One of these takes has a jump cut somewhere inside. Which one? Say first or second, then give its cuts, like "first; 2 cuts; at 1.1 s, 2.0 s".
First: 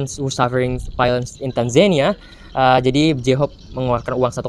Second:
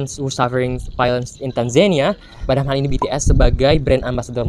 second; 1 cut; at 2.4 s